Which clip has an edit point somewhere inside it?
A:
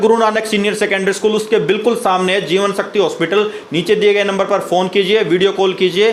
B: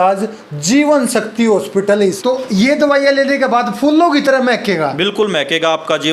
B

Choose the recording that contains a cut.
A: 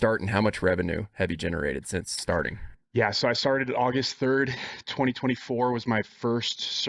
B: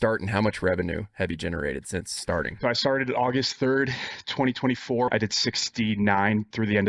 B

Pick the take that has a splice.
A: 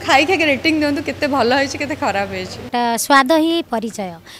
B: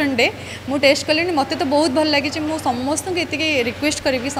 A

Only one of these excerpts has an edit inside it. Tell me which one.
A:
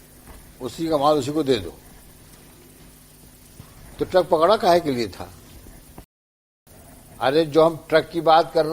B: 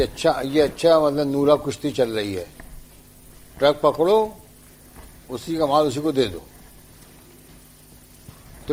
A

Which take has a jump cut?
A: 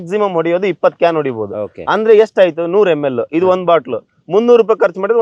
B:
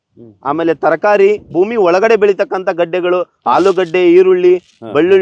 B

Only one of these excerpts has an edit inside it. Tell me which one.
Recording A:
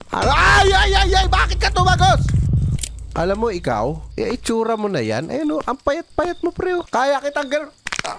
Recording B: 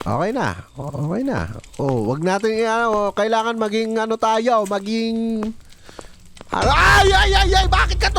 A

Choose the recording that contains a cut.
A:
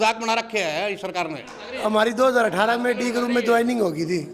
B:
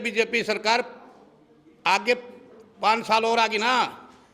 A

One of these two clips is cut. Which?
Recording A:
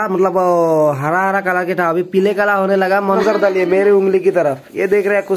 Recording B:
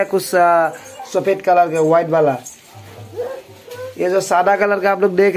A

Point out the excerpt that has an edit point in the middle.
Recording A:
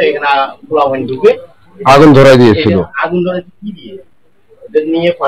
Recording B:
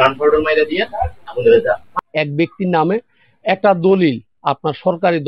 B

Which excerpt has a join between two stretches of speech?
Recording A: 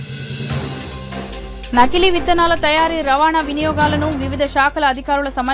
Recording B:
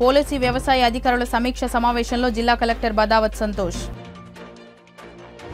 A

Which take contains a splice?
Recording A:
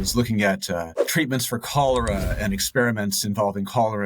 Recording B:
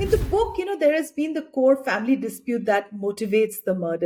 A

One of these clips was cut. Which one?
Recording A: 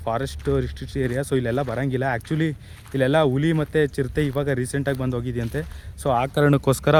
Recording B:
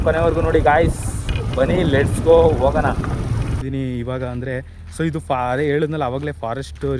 B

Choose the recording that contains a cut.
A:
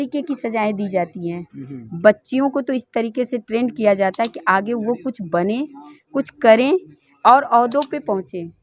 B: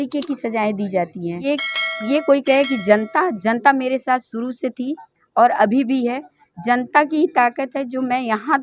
B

